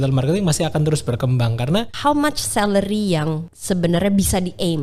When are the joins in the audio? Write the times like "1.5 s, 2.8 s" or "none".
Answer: 1.9 s, 3.5 s